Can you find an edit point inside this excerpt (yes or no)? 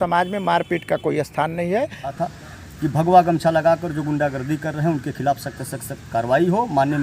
yes